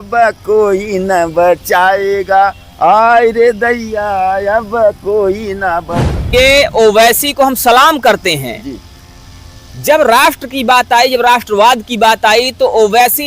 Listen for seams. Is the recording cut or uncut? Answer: cut